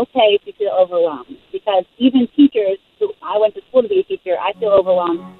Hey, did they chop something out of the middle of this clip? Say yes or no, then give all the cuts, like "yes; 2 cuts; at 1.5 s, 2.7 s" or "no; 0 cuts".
no; 0 cuts